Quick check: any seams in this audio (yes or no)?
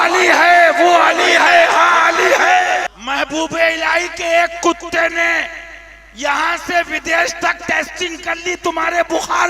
yes